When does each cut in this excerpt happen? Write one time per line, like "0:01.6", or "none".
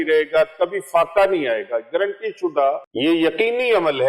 0:02.9